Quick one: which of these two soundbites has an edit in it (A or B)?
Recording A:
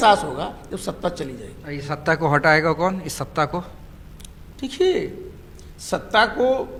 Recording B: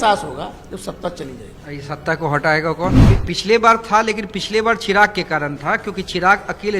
B